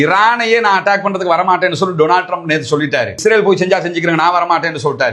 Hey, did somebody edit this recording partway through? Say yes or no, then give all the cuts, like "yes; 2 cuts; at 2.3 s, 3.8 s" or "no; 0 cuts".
no; 0 cuts